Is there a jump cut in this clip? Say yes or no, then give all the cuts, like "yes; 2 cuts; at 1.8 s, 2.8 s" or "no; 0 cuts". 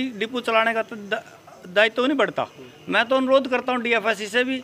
no; 0 cuts